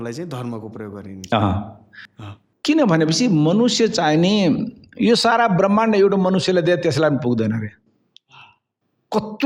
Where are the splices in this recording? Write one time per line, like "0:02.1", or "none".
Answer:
none